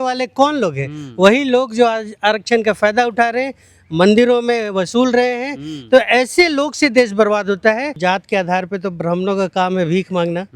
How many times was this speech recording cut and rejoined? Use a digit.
1